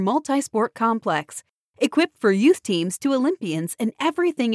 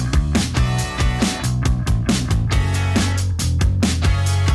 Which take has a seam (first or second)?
second